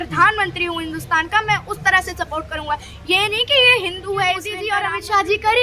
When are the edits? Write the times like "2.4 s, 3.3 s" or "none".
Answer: 4.7 s